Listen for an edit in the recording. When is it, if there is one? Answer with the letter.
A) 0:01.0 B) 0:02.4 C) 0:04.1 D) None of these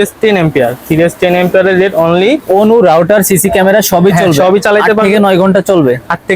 B